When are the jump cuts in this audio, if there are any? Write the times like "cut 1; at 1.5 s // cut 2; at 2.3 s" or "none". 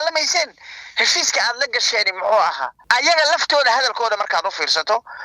cut 1; at 2.7 s